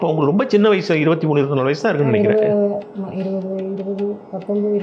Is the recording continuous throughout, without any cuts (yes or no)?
no